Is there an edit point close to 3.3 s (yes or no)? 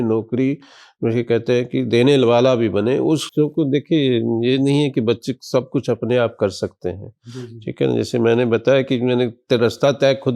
yes